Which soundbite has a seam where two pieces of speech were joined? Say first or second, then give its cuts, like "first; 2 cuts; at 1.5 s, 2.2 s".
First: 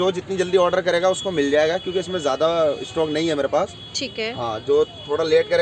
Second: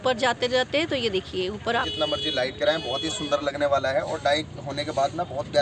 second; 1 cut; at 1.9 s